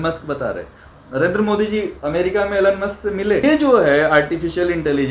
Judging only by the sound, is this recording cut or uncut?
cut